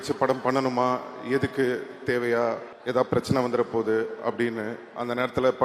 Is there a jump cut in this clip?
yes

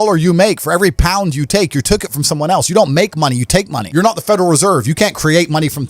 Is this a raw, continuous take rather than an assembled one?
no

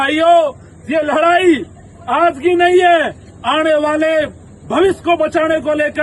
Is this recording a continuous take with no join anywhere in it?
yes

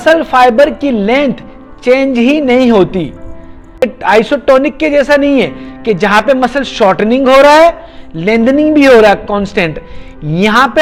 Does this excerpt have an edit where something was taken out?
no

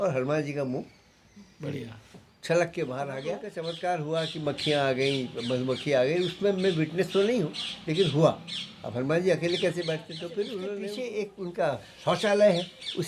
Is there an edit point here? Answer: yes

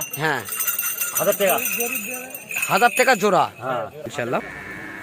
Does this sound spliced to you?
yes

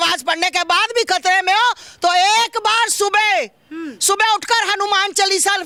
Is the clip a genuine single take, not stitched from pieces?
yes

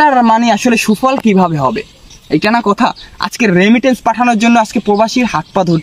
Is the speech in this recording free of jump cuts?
yes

